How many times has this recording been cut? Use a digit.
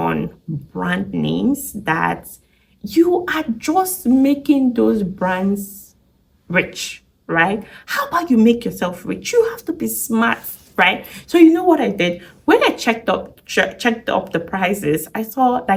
0